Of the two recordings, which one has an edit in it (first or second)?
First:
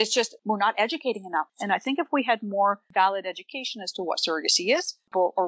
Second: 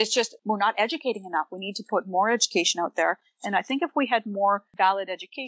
first